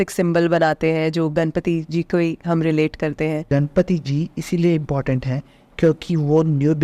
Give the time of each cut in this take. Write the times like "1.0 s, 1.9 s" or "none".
3.4 s